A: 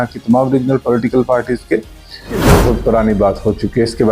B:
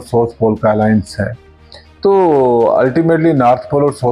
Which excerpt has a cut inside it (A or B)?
A